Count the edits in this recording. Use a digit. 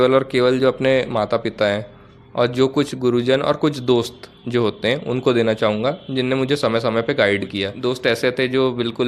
1